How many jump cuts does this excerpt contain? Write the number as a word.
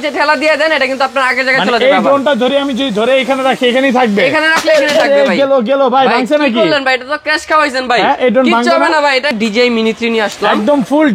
one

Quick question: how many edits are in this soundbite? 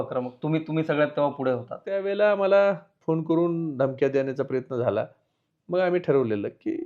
one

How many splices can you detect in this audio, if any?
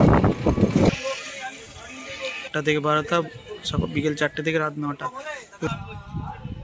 two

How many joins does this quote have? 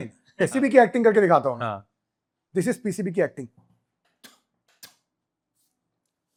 zero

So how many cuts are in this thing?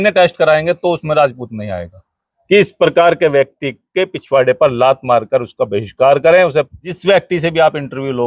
two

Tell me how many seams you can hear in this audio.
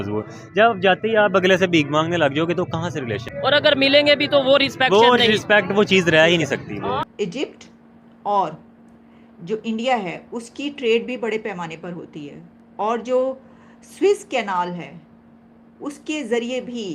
two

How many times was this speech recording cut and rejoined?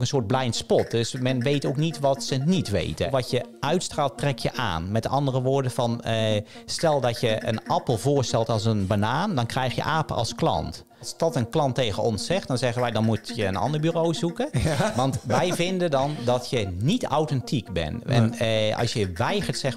two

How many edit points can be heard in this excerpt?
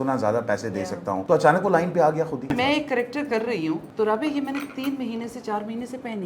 three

